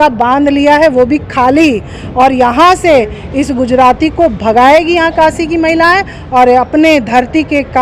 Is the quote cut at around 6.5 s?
no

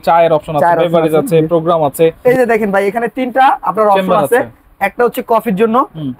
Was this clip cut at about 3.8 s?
no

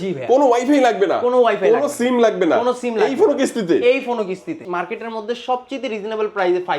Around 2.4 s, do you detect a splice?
no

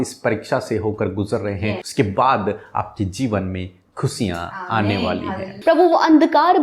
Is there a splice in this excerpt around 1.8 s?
yes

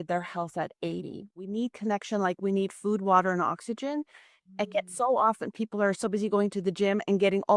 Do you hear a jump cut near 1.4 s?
yes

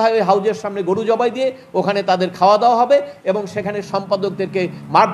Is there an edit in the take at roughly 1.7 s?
no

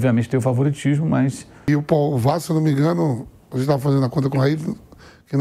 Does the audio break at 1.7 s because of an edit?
yes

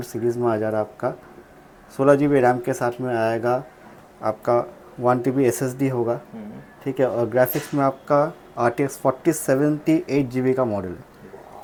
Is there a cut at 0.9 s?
no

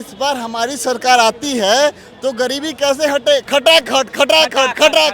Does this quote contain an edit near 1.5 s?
no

